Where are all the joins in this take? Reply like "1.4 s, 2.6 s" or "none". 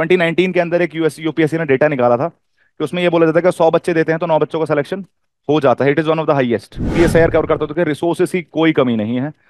6.9 s